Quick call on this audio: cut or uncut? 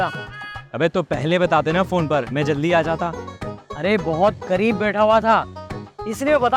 uncut